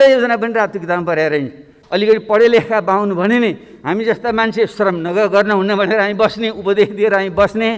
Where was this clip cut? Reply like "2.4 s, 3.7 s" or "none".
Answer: 1.7 s